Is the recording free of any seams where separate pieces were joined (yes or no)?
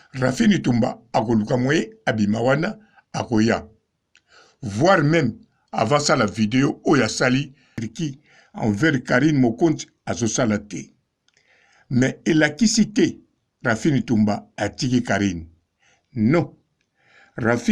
no